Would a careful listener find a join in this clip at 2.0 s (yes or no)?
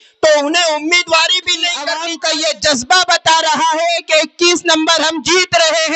yes